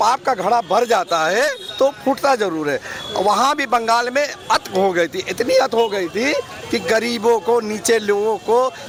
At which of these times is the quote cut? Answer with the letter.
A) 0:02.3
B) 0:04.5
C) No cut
C